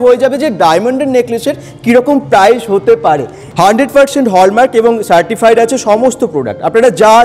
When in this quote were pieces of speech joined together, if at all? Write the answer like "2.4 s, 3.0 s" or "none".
3.4 s